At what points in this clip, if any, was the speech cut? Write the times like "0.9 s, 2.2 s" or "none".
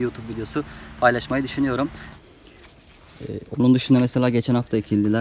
2.2 s